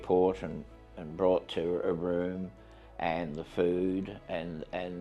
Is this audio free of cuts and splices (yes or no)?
yes